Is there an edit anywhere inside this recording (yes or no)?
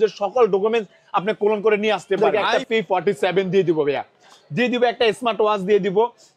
yes